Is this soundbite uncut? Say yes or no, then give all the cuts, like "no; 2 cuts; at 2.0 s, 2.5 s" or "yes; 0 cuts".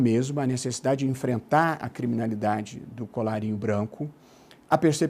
no; 1 cut; at 3.6 s